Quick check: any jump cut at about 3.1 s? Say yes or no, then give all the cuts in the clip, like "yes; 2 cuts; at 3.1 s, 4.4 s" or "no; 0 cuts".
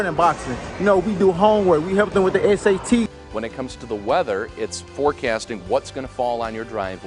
yes; 1 cut; at 3.1 s